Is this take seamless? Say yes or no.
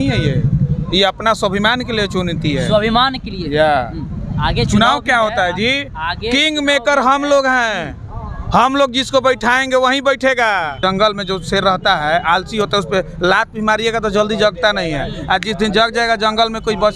no